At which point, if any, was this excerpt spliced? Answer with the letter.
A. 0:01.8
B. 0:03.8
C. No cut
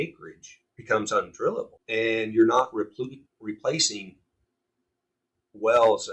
A